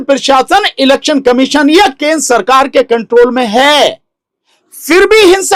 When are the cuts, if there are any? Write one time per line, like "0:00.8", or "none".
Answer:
none